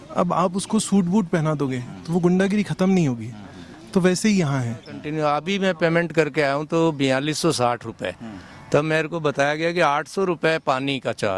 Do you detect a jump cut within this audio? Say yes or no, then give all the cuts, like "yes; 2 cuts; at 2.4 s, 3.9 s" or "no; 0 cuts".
yes; 1 cut; at 5.0 s